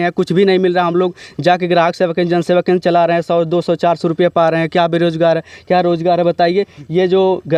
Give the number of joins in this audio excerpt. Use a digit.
0